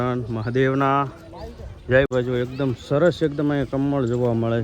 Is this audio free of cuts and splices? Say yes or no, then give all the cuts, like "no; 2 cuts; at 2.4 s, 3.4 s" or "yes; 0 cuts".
no; 1 cut; at 2.1 s